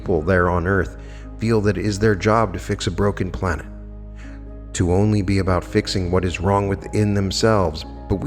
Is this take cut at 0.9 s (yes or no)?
no